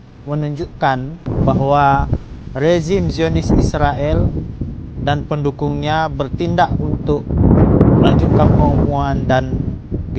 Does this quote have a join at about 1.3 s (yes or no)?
yes